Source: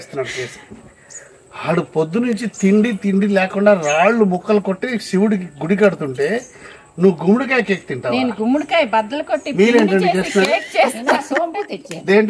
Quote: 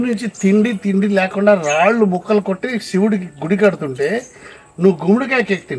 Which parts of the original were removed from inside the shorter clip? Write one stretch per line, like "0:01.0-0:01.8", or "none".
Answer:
none